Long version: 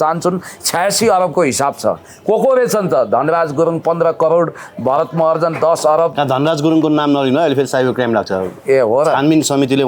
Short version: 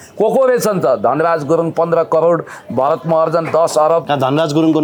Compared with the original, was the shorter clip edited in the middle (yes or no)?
no